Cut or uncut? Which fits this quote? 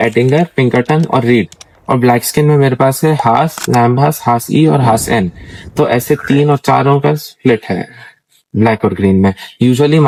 uncut